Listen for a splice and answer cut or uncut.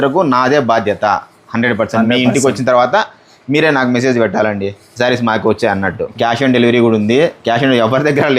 cut